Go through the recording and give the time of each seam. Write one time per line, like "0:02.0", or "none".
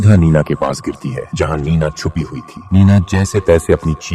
none